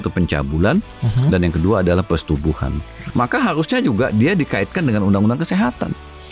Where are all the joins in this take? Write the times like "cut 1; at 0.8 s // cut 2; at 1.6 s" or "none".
cut 1; at 3.1 s